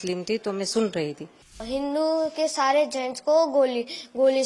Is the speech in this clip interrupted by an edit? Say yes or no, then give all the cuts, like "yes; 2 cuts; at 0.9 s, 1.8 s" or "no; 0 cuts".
yes; 1 cut; at 1.6 s